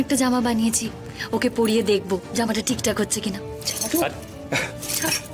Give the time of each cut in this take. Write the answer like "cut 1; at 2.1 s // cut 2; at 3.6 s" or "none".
none

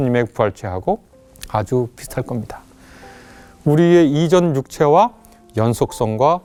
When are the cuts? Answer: none

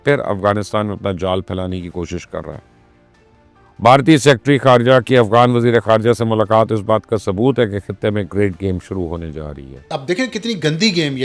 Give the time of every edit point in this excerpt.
cut 1; at 9.8 s

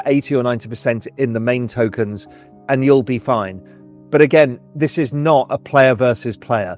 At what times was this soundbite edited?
none

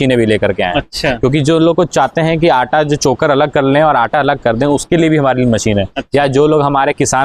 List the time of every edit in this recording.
none

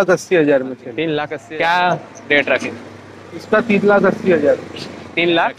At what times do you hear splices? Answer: cut 1; at 1.3 s

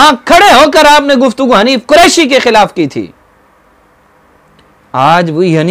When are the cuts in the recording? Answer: none

